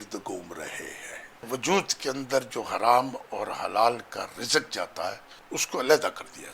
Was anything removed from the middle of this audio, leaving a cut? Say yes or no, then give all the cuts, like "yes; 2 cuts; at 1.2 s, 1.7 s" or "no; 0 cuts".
yes; 2 cuts; at 1.5 s, 5.3 s